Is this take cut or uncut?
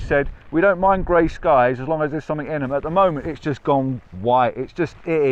uncut